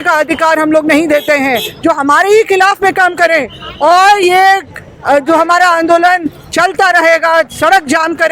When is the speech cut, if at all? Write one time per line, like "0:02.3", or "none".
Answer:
none